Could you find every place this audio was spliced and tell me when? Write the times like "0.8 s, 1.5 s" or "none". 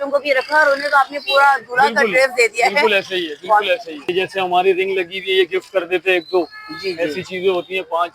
4.1 s